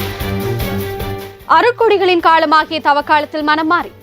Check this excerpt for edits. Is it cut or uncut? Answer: cut